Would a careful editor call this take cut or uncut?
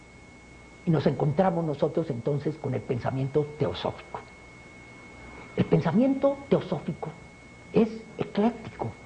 cut